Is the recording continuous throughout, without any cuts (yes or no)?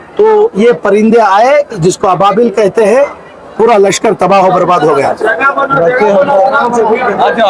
yes